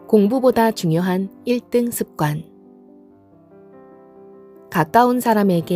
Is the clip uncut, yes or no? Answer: yes